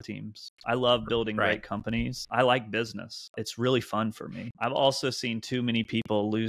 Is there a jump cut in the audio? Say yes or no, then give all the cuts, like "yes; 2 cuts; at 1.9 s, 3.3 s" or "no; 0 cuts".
yes; 3 cuts; at 2.2 s, 3.4 s, 4.5 s